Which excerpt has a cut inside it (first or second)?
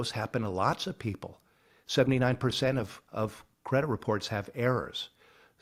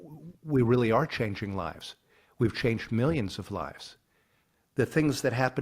second